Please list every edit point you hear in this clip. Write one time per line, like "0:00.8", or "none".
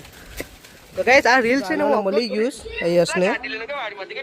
0:01.8